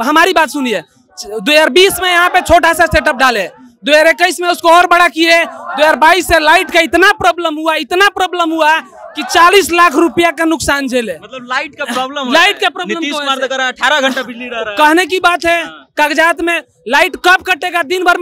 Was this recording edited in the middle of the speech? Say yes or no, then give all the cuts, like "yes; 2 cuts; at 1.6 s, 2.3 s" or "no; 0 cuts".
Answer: no; 0 cuts